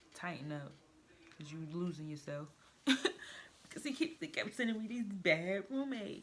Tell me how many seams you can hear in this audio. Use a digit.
0